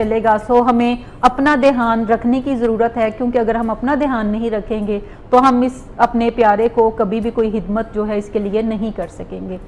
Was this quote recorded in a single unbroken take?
yes; 0 cuts

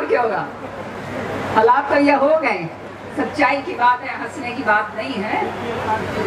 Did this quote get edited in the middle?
no; 0 cuts

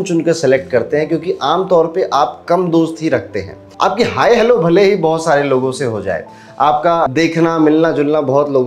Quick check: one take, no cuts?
yes; 0 cuts

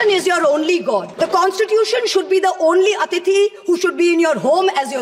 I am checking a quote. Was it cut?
yes; 1 cut; at 1.1 s

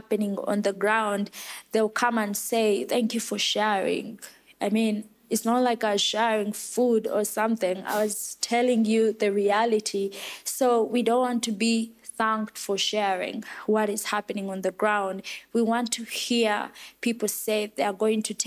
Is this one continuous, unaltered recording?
yes; 0 cuts

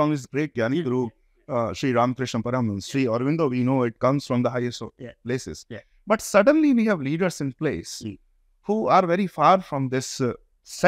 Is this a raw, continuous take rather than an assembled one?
yes; 0 cuts

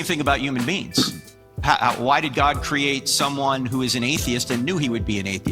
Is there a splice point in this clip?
yes; 1 cut; at 1.7 s

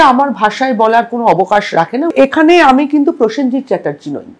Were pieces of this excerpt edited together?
yes; 1 cut; at 2.1 s

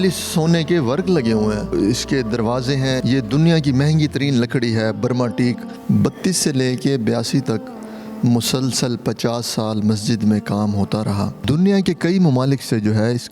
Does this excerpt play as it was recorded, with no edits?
no; 4 cuts; at 1.7 s, 3.0 s, 5.7 s, 11.4 s

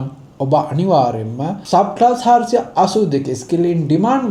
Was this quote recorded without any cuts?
yes; 0 cuts

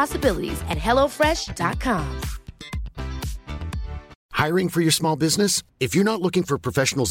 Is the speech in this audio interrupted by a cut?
yes; 1 cut; at 4.1 s

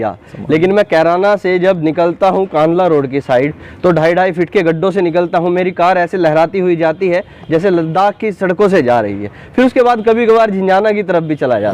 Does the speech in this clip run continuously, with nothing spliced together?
yes; 0 cuts

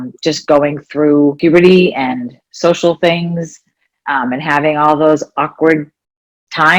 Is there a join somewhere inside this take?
yes; 1 cut; at 1.4 s

